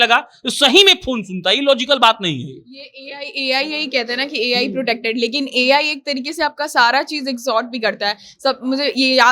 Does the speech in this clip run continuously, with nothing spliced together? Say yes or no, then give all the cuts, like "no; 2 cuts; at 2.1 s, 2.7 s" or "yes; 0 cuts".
yes; 0 cuts